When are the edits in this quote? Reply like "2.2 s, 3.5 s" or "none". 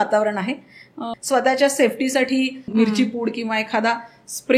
1.0 s, 2.7 s